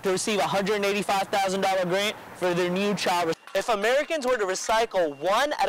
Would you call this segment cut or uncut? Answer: cut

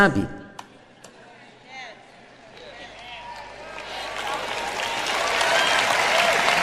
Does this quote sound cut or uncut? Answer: cut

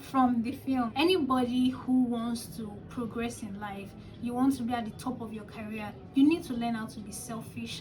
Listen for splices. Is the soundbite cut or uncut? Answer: cut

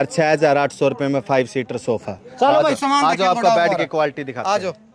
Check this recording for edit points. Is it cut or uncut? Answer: uncut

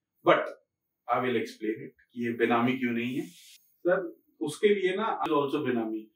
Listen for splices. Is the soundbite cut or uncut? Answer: cut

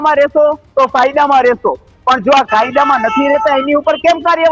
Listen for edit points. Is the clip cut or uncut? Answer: uncut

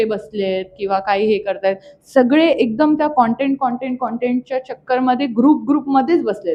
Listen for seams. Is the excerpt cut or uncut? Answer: uncut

